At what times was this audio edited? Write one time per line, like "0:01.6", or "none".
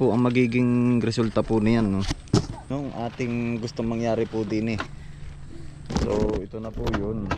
0:02.6

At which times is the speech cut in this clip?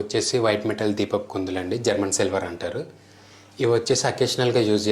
none

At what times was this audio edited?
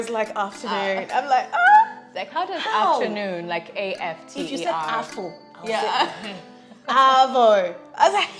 none

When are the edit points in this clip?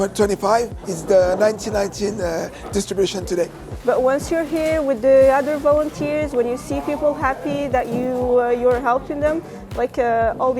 0:03.6

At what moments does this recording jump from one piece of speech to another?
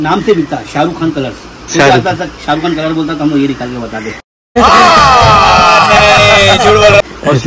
none

